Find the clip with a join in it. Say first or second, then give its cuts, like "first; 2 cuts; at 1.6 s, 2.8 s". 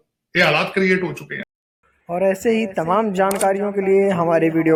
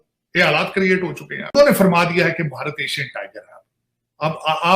second; 1 cut; at 1.5 s